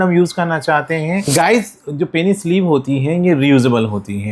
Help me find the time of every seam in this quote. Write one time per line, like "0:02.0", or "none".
0:01.2